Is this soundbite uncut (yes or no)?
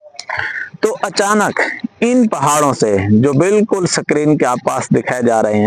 yes